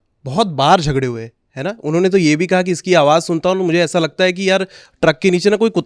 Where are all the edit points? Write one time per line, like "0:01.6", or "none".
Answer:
none

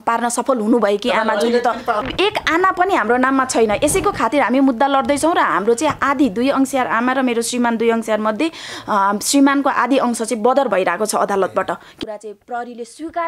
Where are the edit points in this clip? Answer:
0:02.1
0:11.9

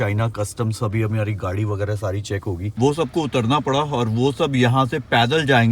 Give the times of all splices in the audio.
0:02.6

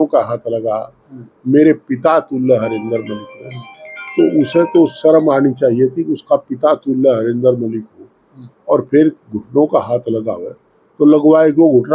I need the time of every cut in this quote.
none

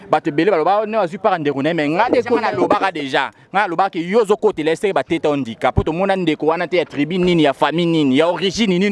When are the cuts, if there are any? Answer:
none

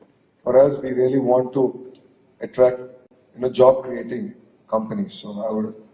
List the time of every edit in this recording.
none

